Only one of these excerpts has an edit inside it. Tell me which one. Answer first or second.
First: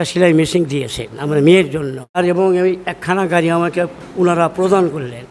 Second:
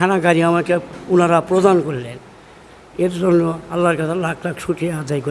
first